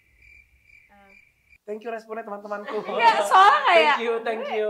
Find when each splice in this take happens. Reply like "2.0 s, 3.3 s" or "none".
none